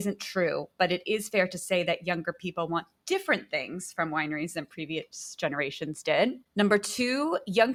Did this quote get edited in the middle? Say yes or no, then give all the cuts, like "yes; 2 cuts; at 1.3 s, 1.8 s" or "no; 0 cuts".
no; 0 cuts